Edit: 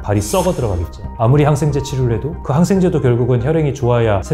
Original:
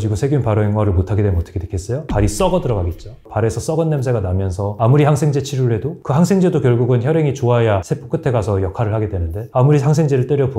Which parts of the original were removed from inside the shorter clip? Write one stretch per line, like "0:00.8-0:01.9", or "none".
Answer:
0:03.1-0:04.7